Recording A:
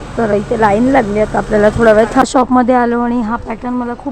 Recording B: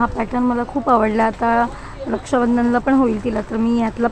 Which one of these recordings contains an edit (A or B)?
A